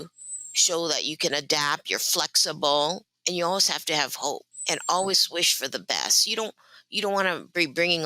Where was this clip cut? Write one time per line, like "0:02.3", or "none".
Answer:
0:03.1
0:04.5